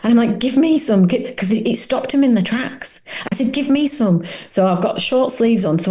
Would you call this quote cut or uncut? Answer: uncut